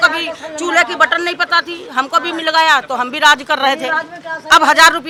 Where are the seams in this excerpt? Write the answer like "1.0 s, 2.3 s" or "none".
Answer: none